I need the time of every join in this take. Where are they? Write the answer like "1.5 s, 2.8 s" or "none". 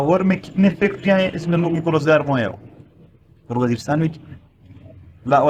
none